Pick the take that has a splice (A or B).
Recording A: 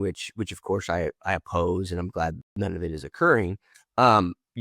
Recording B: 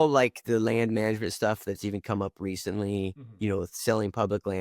A